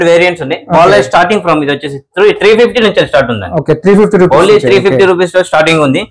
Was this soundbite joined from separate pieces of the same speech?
no; 0 cuts

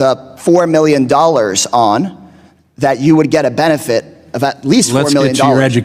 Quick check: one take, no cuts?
yes; 0 cuts

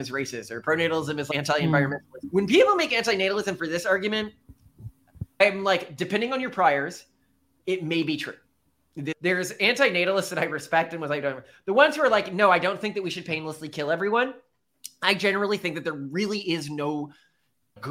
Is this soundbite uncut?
no; 4 cuts; at 1.3 s, 2.1 s, 5.4 s, 9.1 s

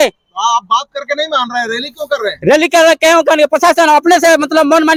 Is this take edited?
no; 0 cuts

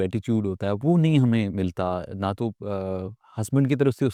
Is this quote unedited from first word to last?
yes; 0 cuts

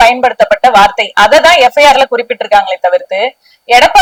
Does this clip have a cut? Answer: no; 0 cuts

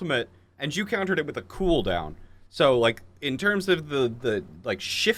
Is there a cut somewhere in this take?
no; 0 cuts

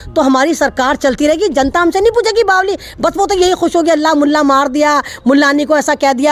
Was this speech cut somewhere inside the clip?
no; 0 cuts

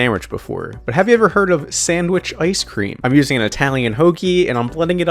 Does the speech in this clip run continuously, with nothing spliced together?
no; 1 cut; at 2.9 s

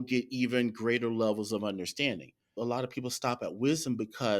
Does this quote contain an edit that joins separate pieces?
yes; 1 cut; at 2.6 s

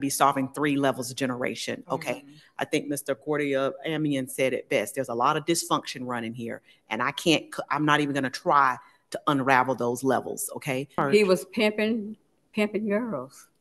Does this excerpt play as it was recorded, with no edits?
no; 1 cut; at 11.0 s

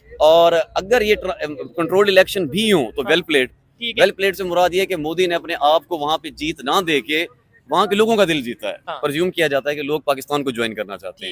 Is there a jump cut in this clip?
yes; 1 cut; at 8.8 s

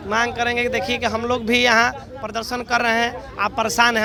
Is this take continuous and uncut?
yes; 0 cuts

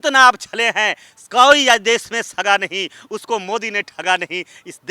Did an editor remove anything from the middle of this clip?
no; 0 cuts

